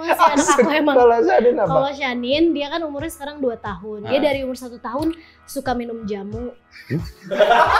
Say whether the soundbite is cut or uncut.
uncut